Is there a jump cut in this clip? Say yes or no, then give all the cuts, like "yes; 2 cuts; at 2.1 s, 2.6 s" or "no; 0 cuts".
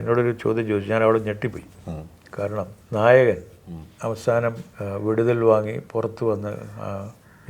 yes; 2 cuts; at 2.8 s, 4.7 s